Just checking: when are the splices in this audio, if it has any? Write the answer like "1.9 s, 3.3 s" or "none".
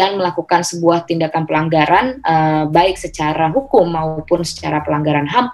none